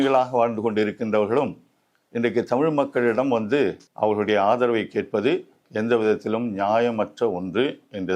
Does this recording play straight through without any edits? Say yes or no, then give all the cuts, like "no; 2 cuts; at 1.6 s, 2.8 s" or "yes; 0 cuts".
no; 1 cut; at 3.8 s